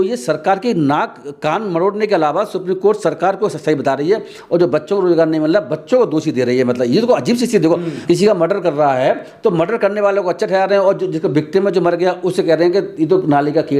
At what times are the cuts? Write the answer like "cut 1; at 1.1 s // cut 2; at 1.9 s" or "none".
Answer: cut 1; at 7.9 s

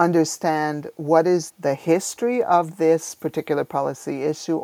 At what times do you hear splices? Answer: cut 1; at 1.5 s

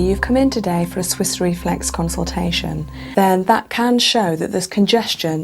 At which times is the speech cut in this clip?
cut 1; at 2.9 s

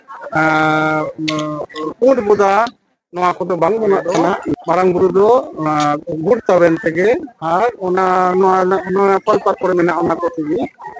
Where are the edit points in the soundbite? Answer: cut 1; at 4.5 s

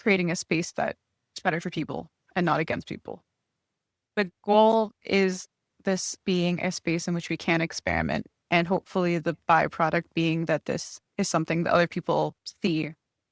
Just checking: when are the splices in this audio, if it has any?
cut 1; at 4.1 s // cut 2; at 11.0 s // cut 3; at 12.4 s

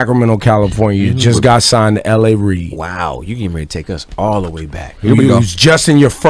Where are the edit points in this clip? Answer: none

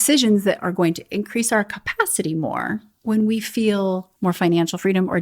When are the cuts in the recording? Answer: cut 1; at 2.9 s // cut 2; at 4.1 s

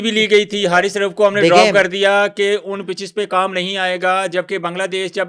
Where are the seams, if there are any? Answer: none

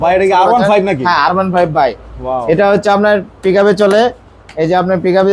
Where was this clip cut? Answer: none

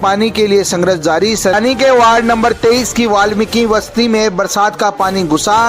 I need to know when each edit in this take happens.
cut 1; at 1.5 s

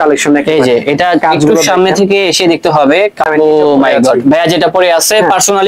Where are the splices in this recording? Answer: cut 1; at 3.3 s

